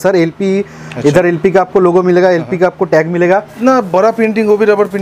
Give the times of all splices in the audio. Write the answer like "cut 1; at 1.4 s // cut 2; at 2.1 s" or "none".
cut 1; at 3.5 s